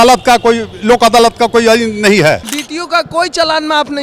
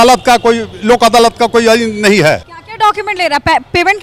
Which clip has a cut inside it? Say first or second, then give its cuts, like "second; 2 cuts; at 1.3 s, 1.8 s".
first; 1 cut; at 2.6 s